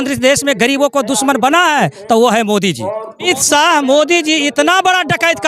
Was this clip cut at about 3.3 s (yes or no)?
yes